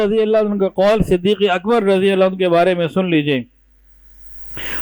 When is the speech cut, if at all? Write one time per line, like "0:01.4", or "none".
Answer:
none